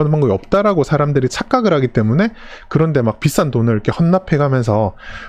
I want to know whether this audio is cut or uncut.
uncut